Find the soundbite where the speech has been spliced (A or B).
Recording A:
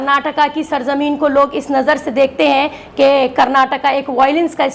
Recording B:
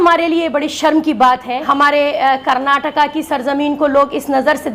B